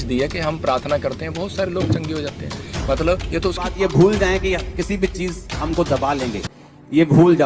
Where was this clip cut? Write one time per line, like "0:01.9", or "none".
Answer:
0:03.7